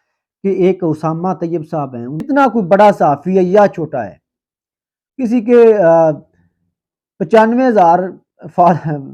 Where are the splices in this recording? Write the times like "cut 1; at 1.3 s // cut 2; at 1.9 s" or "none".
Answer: cut 1; at 2.2 s